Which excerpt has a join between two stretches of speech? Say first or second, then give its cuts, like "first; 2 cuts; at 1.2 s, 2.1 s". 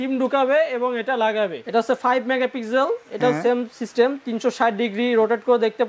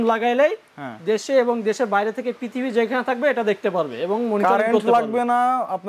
first; 1 cut; at 1.6 s